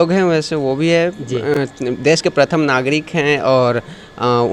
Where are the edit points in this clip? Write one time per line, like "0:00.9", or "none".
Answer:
none